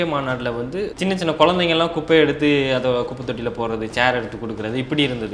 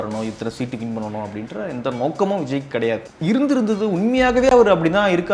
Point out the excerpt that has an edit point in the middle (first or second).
first